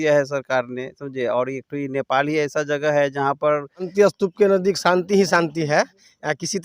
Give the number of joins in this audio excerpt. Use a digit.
1